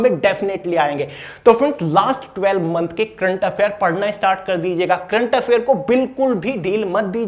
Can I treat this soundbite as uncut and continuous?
yes; 0 cuts

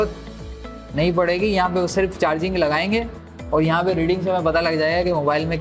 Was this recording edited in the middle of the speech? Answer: no; 0 cuts

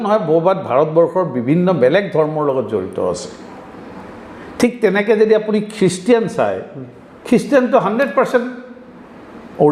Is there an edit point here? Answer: no; 0 cuts

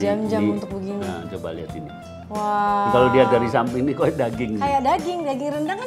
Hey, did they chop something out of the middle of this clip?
no; 0 cuts

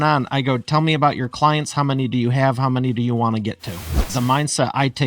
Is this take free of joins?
no; 1 cut; at 4.1 s

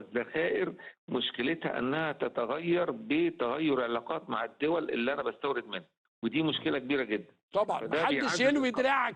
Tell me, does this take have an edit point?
no; 0 cuts

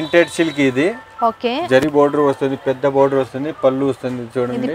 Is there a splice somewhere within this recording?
no; 0 cuts

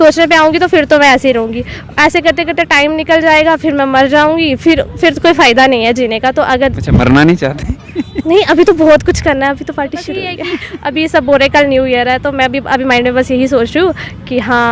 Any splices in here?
yes; 1 cut; at 10.5 s

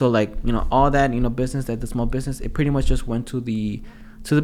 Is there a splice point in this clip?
no; 0 cuts

